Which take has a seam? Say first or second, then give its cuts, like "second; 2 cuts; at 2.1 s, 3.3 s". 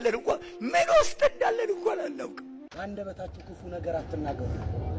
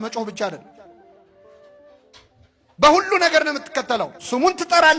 first; 1 cut; at 2.7 s